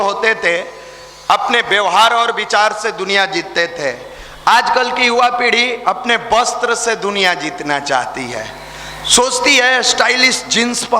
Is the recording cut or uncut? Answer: uncut